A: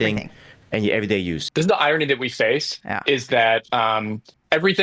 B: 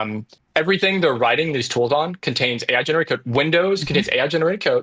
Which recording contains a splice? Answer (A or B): A